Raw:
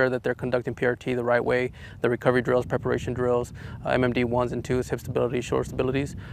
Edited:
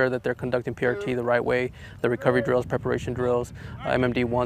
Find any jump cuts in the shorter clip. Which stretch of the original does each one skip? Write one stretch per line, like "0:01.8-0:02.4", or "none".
none